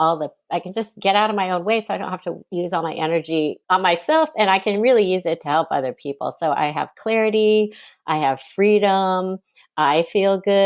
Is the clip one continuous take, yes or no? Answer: no